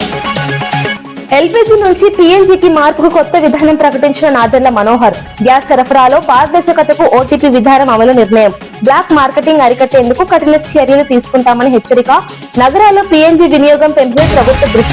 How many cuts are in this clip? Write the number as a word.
one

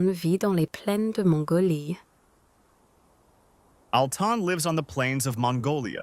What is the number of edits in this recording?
zero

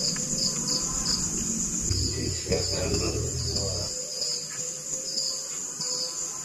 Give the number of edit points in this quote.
zero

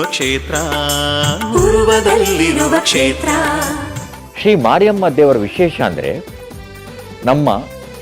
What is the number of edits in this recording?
one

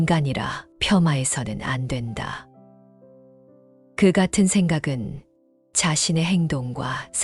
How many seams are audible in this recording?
two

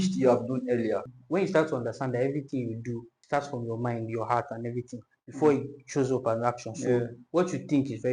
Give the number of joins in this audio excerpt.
two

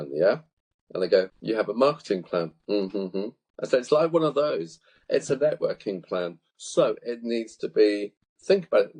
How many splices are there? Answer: zero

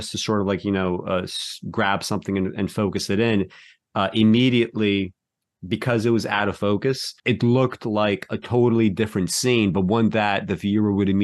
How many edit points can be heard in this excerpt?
one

